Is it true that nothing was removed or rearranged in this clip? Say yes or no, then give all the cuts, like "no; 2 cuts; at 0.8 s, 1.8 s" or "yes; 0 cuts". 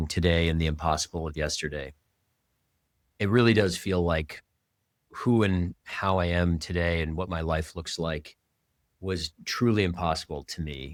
yes; 0 cuts